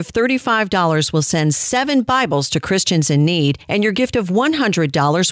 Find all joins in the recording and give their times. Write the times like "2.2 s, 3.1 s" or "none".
3.6 s